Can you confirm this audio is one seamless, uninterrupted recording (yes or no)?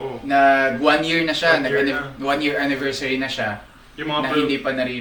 yes